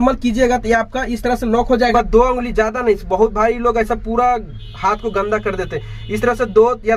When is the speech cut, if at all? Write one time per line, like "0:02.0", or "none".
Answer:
0:01.9